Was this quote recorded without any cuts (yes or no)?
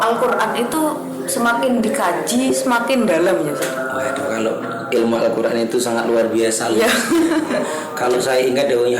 no